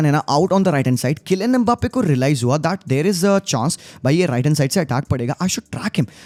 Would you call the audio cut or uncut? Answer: uncut